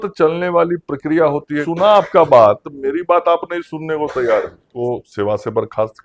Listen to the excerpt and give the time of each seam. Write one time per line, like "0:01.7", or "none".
0:01.7
0:04.7